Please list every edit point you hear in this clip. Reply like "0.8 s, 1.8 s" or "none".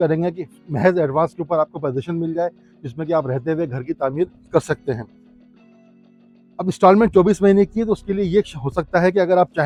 none